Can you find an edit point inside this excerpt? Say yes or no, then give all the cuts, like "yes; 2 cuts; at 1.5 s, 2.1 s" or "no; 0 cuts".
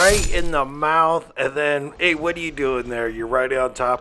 no; 0 cuts